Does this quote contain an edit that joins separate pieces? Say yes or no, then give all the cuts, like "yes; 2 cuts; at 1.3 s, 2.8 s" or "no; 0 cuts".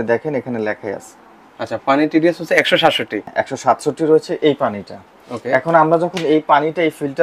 yes; 1 cut; at 3.2 s